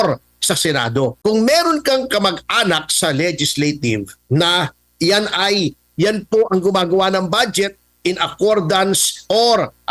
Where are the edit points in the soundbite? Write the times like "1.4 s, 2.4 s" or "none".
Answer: 1.2 s

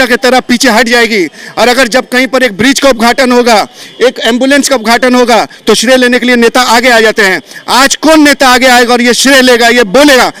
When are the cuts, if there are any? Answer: none

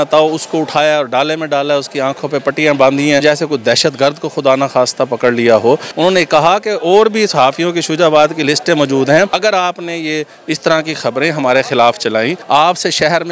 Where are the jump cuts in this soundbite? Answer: 3.2 s, 5.9 s, 9.3 s, 12.4 s

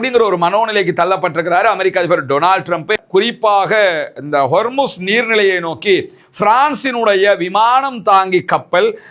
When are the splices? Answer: 3.0 s

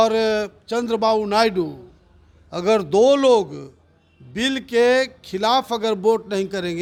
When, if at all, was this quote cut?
none

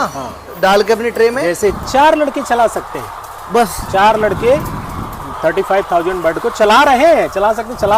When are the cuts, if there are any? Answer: 1.8 s

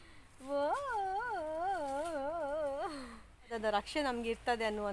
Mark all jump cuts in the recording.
3.5 s

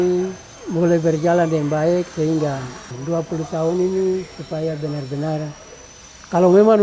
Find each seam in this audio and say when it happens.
none

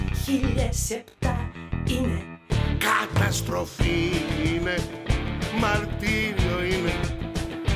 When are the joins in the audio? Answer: 2.4 s

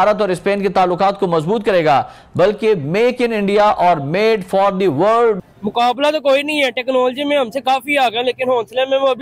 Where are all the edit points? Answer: 5.4 s

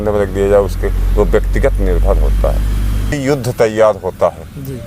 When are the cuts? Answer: 3.2 s

